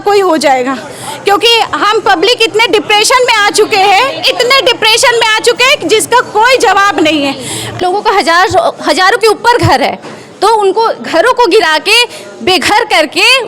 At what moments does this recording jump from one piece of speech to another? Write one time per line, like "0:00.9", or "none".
0:07.8